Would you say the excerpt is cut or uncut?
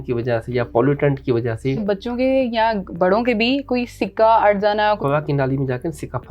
cut